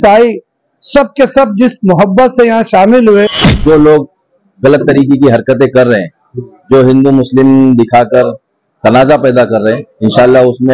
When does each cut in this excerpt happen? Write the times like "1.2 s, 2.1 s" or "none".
3.4 s